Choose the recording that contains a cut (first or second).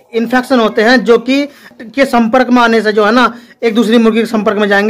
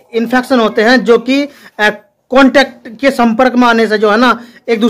first